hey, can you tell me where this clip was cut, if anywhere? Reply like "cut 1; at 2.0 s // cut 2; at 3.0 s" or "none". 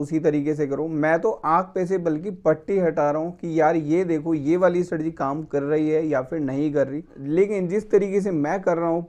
cut 1; at 7.0 s